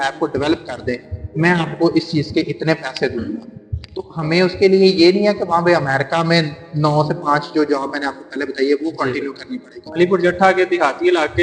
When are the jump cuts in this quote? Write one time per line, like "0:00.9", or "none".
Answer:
0:09.8